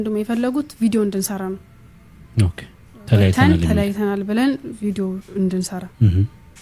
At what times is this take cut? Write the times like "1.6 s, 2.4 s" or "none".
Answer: none